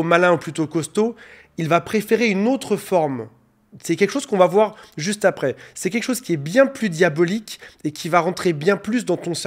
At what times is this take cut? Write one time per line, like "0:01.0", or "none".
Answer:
none